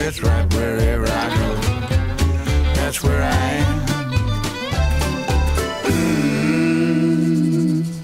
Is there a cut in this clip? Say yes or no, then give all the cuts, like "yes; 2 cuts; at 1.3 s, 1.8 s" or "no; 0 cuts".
no; 0 cuts